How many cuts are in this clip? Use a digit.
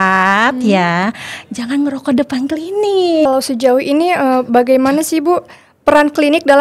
1